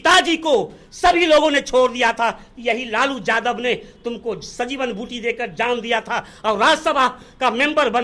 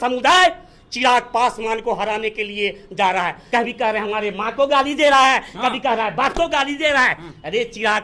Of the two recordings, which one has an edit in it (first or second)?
second